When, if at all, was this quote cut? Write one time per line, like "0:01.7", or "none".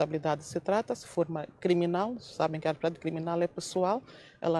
none

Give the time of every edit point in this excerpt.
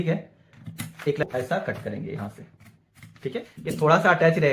0:01.2

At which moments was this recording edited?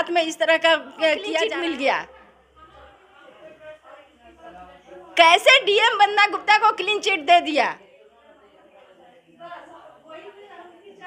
0:01.3

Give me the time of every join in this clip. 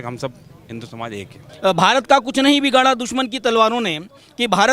0:01.4

